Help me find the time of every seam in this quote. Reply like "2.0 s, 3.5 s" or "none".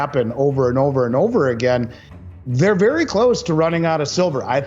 none